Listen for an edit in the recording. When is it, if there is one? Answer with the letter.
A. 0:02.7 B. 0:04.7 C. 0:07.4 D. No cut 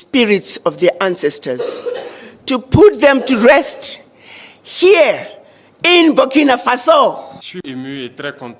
C